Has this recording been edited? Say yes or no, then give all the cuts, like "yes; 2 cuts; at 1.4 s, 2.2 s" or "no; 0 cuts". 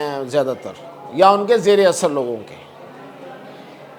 no; 0 cuts